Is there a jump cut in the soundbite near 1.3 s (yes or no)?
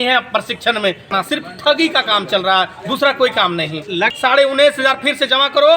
yes